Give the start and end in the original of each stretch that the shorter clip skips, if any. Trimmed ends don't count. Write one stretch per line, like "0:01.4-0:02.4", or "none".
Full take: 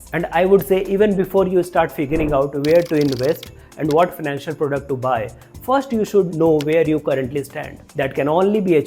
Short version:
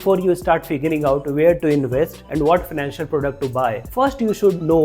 0:03.5-0:03.7
0:05.3-0:05.6